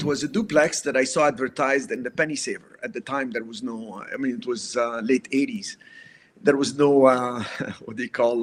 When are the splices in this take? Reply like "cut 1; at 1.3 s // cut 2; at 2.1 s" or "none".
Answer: none